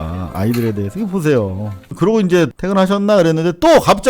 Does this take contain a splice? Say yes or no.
yes